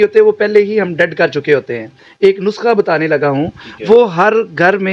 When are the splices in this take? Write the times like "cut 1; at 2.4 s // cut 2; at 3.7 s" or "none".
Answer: cut 1; at 2.0 s